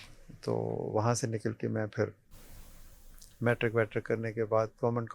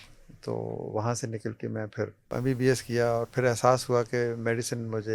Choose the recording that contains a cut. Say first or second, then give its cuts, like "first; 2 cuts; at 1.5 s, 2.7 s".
second; 1 cut; at 2.3 s